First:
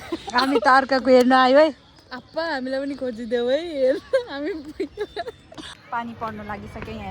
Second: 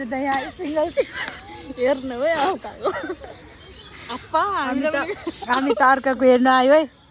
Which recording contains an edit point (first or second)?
first